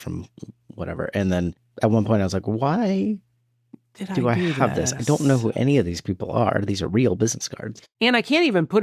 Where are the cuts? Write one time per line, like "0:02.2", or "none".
0:01.6